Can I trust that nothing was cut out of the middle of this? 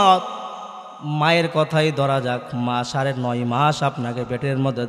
yes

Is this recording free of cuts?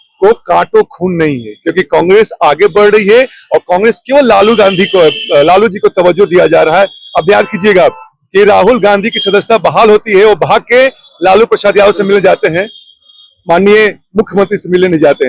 yes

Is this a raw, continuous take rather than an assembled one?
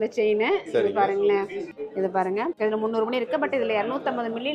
no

